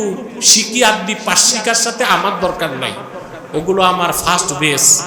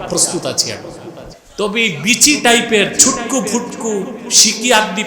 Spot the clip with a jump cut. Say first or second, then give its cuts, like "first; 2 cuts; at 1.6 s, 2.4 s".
second; 1 cut; at 1.4 s